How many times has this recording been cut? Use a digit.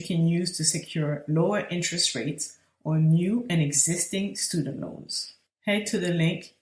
0